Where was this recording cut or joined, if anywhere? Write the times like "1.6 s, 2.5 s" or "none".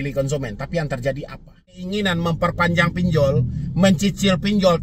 1.9 s